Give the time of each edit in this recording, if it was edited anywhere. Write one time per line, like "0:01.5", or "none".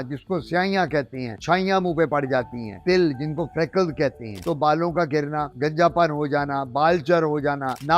0:02.8
0:04.4